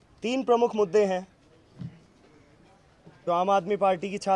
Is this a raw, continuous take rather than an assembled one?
yes; 0 cuts

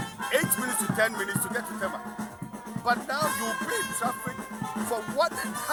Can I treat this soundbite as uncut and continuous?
yes; 0 cuts

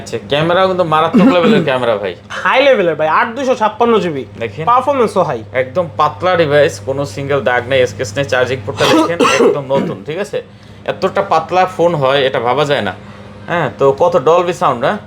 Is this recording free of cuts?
yes; 0 cuts

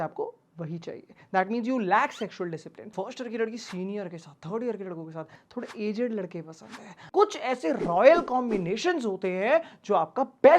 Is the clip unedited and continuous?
no; 3 cuts; at 2.9 s, 5.4 s, 7.1 s

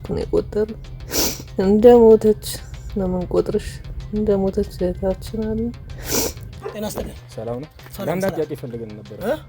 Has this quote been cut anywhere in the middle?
yes; 1 cut; at 6.5 s

